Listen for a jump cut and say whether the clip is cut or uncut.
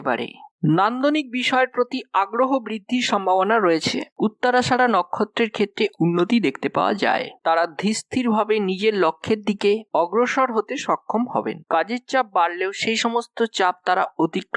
cut